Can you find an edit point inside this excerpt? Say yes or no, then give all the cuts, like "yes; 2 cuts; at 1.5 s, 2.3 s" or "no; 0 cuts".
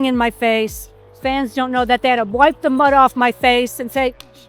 no; 0 cuts